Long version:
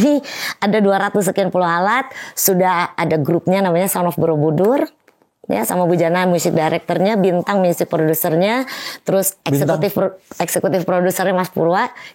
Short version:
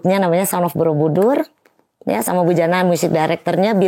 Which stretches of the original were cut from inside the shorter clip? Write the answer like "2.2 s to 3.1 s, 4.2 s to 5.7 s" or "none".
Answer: none